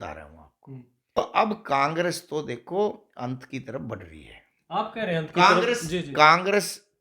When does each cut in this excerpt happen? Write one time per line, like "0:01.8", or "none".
0:01.2